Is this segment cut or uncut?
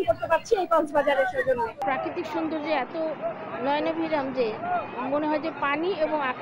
cut